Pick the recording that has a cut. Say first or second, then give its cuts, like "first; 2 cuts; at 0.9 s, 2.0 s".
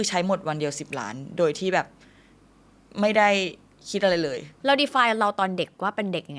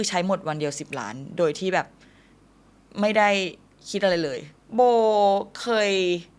first; 1 cut; at 4.5 s